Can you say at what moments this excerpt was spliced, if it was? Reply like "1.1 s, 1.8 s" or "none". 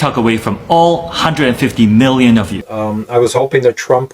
2.6 s